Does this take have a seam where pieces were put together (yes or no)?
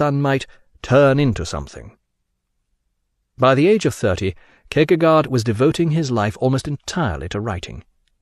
yes